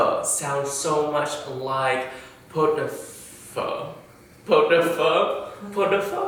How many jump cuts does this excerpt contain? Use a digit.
0